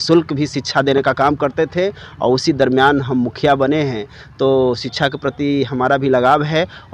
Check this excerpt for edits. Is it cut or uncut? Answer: uncut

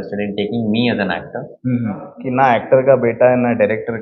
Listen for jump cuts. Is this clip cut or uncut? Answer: cut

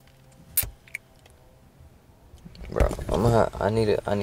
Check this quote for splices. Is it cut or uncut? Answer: uncut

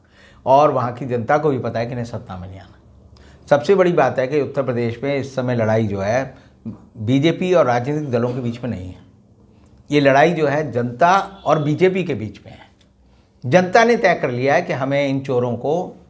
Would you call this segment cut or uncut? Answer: uncut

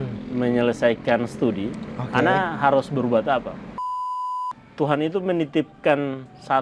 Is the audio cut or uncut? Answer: cut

